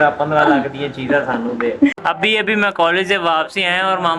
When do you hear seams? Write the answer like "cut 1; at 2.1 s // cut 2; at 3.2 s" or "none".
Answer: cut 1; at 2.1 s